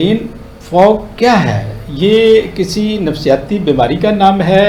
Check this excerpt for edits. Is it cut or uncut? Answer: uncut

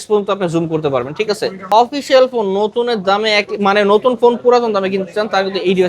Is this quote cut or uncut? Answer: cut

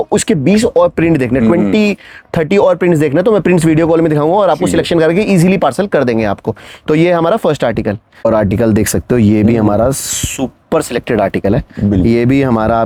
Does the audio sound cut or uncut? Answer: uncut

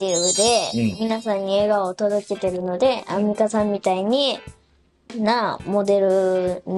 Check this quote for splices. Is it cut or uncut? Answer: uncut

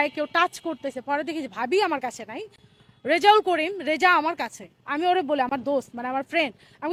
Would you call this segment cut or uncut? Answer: uncut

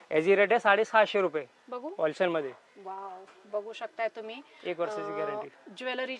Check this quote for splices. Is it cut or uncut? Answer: uncut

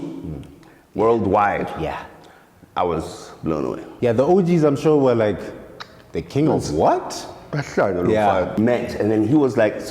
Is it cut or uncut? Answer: cut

